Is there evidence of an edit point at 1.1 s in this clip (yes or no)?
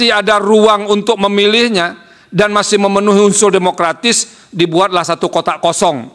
no